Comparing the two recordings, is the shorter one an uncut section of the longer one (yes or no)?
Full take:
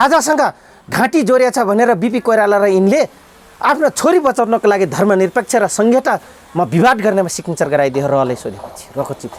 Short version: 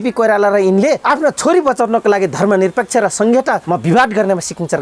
no